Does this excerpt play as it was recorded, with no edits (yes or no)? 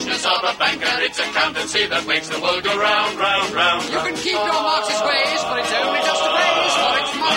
yes